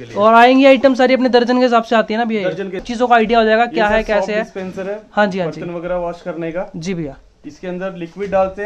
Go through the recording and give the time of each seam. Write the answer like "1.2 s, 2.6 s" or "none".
2.9 s